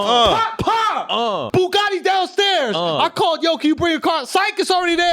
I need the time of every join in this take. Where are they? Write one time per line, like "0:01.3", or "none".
0:01.4